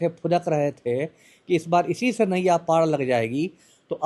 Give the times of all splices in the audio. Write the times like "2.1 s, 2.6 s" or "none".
none